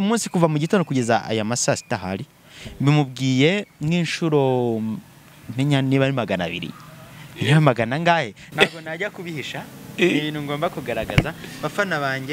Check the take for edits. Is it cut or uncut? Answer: cut